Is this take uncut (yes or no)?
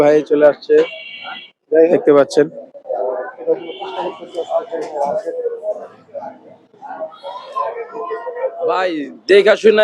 no